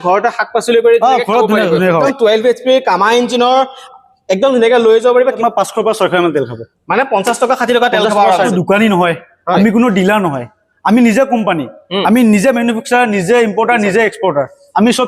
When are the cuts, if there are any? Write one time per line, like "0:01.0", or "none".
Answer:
0:02.1
0:05.4
0:08.5